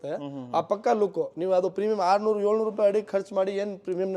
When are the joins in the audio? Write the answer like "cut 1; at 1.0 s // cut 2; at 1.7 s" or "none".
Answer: none

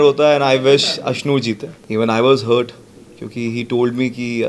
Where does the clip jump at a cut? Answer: cut 1; at 1.7 s

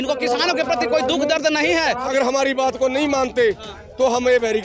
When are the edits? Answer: cut 1; at 2.1 s

